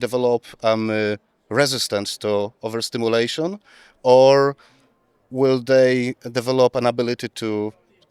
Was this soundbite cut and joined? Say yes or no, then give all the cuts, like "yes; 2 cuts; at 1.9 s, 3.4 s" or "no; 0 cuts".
no; 0 cuts